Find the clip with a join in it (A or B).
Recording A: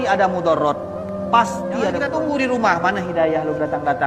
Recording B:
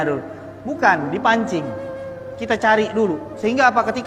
A